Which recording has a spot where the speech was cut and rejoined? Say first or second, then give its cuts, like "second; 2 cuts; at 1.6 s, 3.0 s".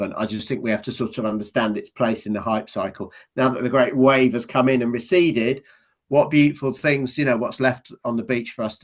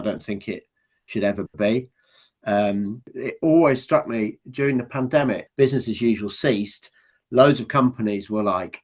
second; 2 cuts; at 3.1 s, 5.4 s